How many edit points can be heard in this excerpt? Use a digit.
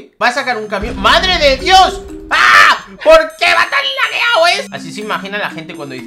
1